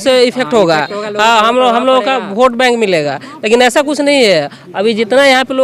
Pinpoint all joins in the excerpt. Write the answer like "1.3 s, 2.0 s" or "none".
none

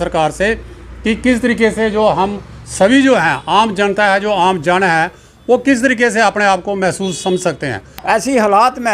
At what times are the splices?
7.9 s

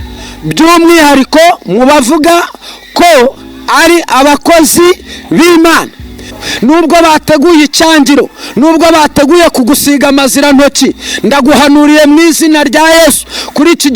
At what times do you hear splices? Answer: 6.4 s

